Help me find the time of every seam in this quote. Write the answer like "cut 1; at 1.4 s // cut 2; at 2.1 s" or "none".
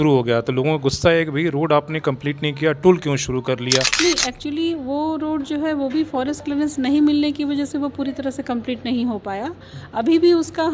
cut 1; at 3.9 s